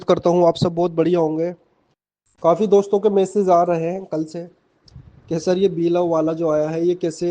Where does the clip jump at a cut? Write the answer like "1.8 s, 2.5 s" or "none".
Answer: 6.1 s